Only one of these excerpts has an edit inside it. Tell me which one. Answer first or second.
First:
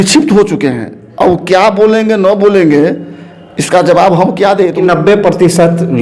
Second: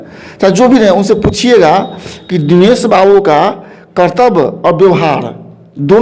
first